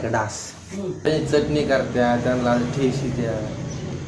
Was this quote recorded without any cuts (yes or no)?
no